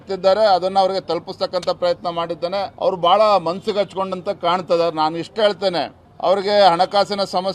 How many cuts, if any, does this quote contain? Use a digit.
2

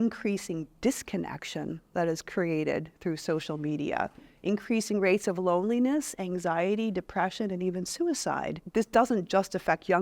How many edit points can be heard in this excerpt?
1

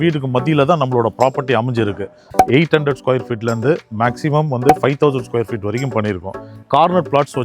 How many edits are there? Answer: 2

